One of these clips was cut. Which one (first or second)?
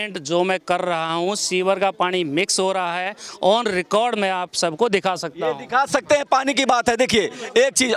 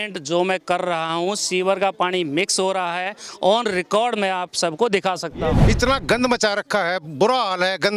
second